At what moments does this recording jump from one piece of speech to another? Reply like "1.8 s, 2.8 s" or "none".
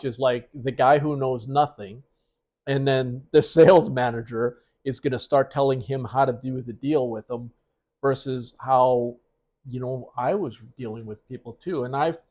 none